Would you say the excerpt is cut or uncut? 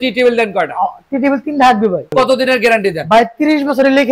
cut